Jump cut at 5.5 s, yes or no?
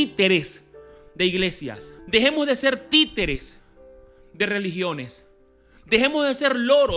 no